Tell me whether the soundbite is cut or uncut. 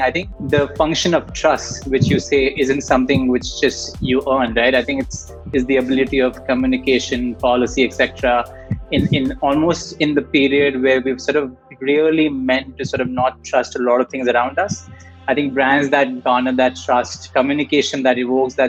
uncut